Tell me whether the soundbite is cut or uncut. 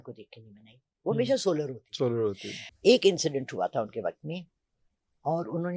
cut